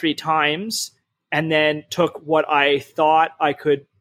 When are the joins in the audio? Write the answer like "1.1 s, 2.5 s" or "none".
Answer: none